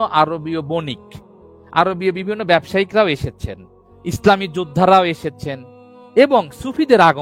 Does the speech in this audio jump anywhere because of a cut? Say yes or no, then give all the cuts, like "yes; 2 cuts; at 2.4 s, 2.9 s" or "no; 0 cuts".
no; 0 cuts